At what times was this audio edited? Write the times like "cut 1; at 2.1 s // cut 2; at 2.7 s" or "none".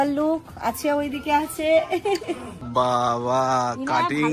cut 1; at 2.6 s